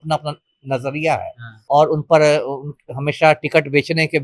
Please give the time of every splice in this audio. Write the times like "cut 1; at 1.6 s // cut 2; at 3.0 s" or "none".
cut 1; at 1.6 s